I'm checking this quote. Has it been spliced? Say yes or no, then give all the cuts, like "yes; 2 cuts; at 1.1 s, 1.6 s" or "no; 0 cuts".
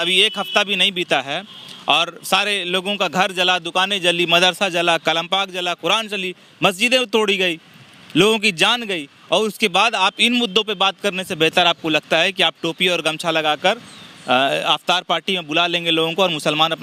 no; 0 cuts